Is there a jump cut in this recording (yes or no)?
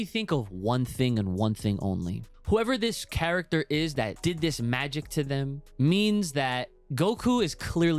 yes